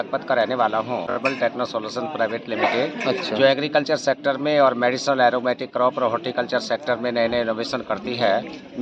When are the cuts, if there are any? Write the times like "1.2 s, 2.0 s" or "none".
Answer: 1.2 s